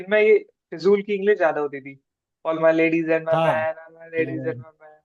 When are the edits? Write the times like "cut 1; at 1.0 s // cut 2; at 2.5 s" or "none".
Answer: none